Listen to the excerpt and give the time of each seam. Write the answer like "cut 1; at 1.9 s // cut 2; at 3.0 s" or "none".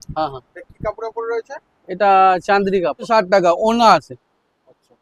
cut 1; at 3.1 s